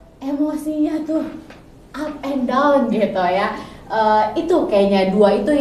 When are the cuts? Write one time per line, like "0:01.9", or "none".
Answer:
none